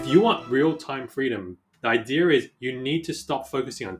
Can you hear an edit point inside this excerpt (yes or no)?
yes